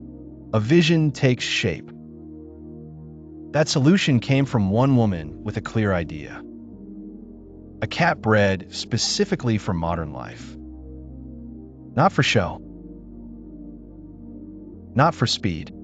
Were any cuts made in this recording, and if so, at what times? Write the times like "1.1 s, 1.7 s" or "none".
1.8 s, 3.3 s, 6.2 s, 7.8 s, 10.3 s, 11.5 s, 12.6 s, 14.6 s